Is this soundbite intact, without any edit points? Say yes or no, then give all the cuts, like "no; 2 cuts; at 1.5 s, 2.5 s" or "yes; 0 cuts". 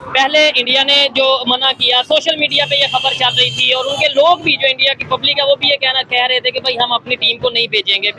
yes; 0 cuts